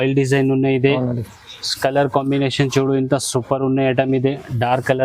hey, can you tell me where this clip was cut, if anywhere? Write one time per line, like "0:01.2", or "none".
none